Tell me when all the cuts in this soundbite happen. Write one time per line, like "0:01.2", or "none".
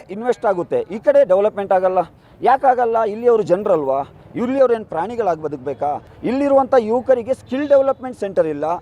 0:06.1